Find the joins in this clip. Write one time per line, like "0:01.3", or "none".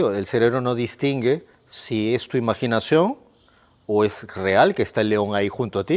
none